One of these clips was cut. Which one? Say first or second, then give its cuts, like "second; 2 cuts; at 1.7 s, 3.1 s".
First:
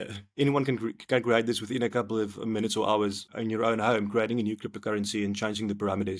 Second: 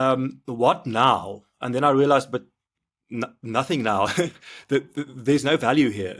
first; 1 cut; at 3.3 s